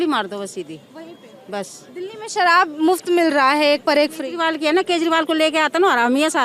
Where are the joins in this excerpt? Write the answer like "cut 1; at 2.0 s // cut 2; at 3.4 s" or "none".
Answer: none